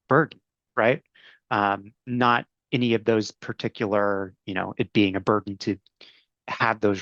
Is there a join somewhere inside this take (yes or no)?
no